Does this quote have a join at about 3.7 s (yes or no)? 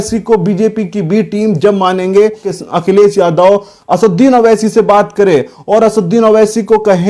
no